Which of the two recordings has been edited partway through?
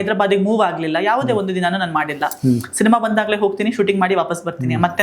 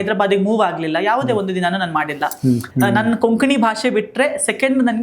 second; 1 cut; at 2.7 s

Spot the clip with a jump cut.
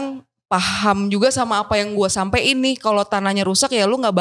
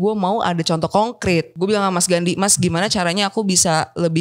second; 1 cut; at 1.5 s

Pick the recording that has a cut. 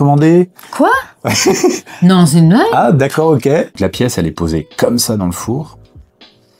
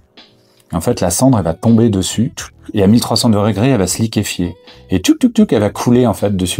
first; 1 cut; at 3.7 s

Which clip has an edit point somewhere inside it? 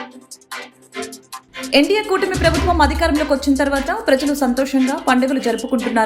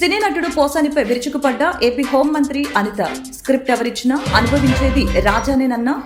first; 1 cut; at 1.7 s

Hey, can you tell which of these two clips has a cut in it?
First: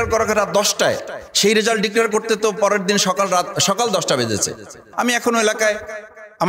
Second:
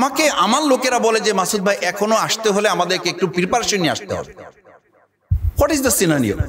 first; 1 cut; at 4.8 s

